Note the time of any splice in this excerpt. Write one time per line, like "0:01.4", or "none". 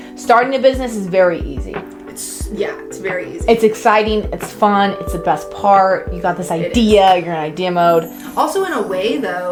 none